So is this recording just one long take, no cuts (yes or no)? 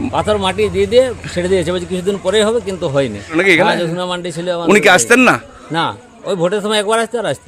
no